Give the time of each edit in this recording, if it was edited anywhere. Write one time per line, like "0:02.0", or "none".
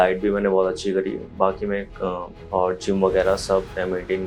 0:02.3